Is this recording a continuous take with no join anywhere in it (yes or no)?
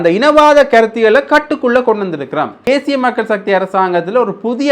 no